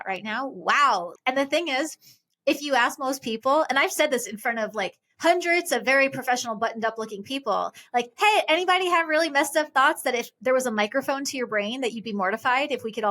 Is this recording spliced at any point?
yes; 1 cut; at 1.1 s

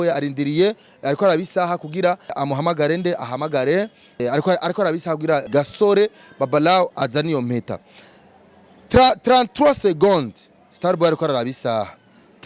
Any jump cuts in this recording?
yes; 3 cuts; at 2.4 s, 4.2 s, 5.5 s

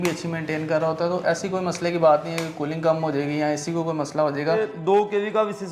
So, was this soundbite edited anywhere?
yes; 1 cut; at 4.7 s

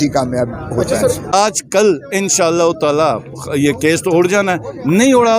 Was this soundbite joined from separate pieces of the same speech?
yes; 1 cut; at 1.3 s

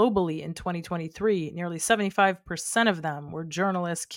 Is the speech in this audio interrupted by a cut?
no; 0 cuts

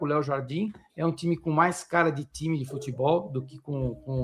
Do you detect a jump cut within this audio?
no; 0 cuts

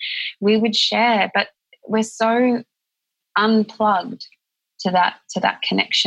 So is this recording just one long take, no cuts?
yes; 0 cuts

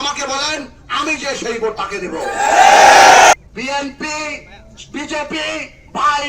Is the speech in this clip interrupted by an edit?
yes; 1 cut; at 3.3 s

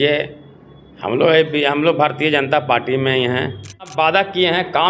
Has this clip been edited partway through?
yes; 1 cut; at 3.9 s

